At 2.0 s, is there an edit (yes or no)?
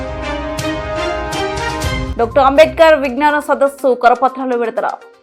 yes